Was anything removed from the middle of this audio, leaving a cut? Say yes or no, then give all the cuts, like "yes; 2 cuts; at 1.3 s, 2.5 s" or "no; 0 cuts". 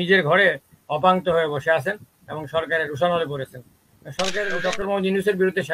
yes; 1 cut; at 4.5 s